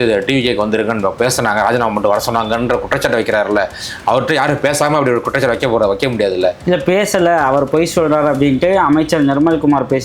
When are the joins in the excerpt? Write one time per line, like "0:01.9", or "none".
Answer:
none